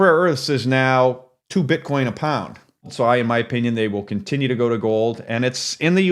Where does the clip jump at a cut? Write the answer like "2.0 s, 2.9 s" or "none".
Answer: 1.3 s, 2.9 s